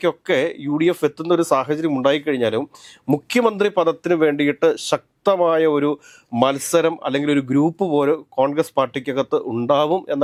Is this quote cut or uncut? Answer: uncut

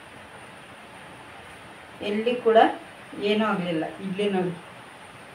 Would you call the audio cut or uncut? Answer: uncut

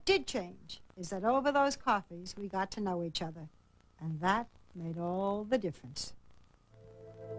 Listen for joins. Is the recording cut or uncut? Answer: cut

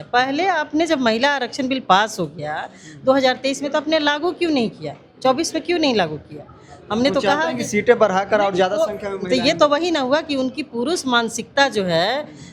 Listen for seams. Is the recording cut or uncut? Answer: uncut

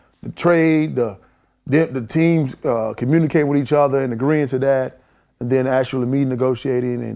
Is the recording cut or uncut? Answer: uncut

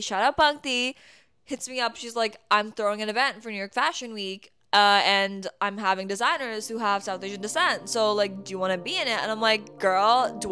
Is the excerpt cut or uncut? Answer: uncut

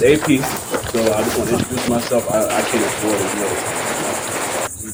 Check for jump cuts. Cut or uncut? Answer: uncut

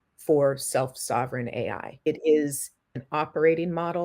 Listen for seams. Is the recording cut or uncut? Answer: cut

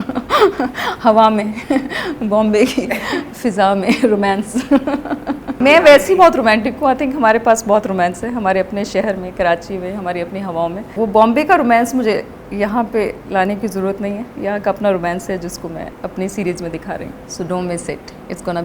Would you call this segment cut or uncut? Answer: cut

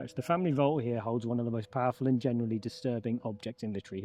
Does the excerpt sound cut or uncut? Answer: uncut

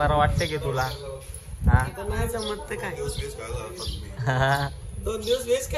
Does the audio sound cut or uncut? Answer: uncut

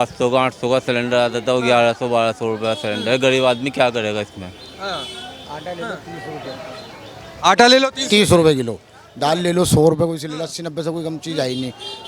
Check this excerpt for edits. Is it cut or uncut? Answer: uncut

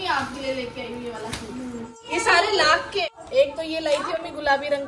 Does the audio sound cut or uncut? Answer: cut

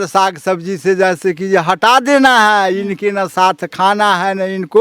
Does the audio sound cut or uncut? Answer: uncut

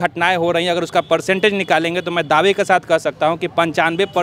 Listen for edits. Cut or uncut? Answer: uncut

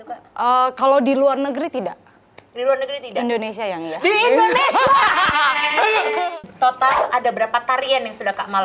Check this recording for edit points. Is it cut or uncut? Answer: cut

